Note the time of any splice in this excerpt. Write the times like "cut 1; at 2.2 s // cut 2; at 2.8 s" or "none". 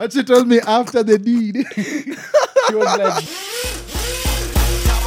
cut 1; at 3.3 s